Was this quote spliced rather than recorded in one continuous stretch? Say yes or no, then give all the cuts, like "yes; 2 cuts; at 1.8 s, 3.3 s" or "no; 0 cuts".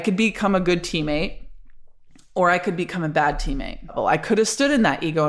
yes; 1 cut; at 3.9 s